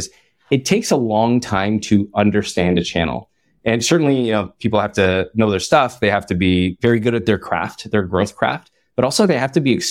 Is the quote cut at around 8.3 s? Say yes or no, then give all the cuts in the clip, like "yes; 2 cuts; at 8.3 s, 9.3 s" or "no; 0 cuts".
no; 1 cut; at 6.8 s